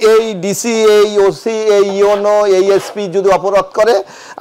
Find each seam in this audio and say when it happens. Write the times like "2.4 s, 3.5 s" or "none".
none